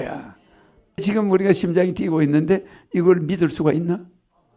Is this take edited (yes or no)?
yes